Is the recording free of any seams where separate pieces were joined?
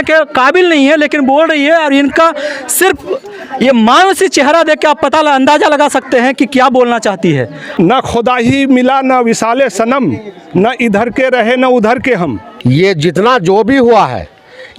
no; 2 cuts; at 7.6 s, 12.4 s

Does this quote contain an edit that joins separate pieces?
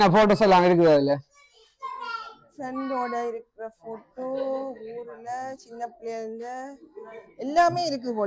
no; 0 cuts

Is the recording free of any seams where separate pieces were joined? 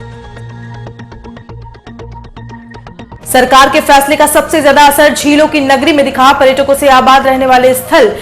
no; 1 cut; at 3.1 s

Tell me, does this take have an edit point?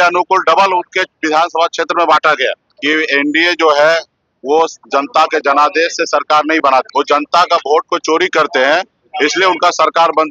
yes; 2 cuts; at 2.7 s, 6.9 s

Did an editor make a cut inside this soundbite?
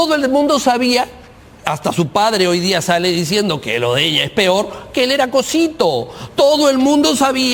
no; 0 cuts

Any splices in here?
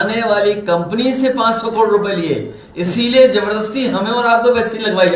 no; 0 cuts

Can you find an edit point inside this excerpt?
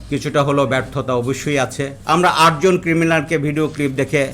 yes; 1 cut; at 1.9 s

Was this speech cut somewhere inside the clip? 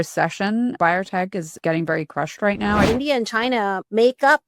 yes; 2 cuts; at 0.8 s, 2.9 s

